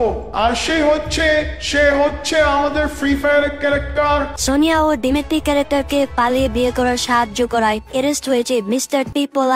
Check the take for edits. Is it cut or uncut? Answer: cut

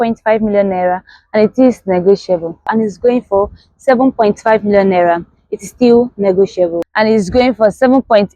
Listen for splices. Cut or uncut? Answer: cut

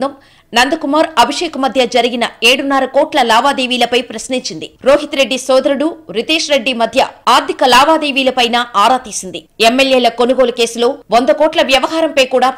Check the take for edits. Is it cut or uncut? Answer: uncut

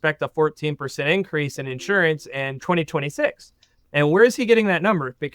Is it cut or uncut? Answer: cut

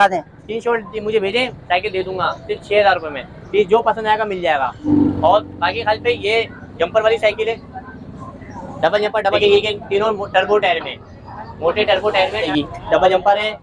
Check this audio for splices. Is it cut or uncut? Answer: cut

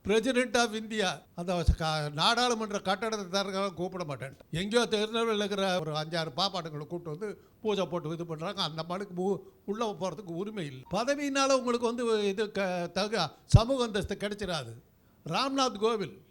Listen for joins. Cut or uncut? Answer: cut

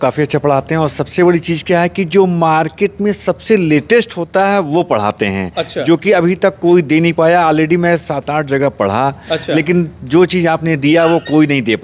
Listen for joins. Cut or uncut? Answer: uncut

